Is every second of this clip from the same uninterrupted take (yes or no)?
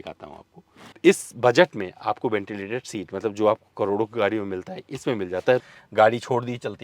no